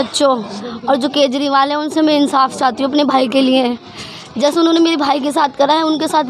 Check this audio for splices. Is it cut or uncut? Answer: uncut